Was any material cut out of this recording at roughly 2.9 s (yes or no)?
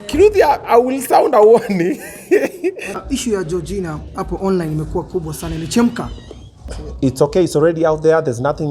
yes